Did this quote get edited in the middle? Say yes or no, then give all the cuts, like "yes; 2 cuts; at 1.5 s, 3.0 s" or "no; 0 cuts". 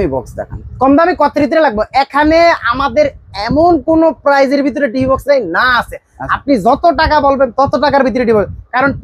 no; 0 cuts